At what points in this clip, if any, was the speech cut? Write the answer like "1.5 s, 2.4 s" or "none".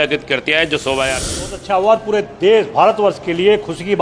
1.5 s